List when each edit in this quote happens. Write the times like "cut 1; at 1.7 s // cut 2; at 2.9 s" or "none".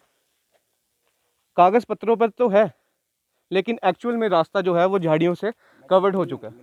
none